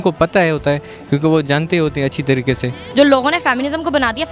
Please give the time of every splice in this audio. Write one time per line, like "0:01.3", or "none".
0:02.8